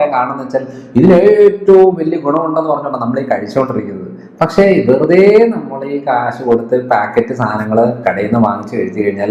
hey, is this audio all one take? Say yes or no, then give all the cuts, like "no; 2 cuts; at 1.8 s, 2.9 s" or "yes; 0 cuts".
yes; 0 cuts